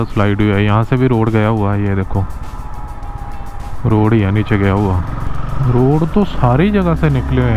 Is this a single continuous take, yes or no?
no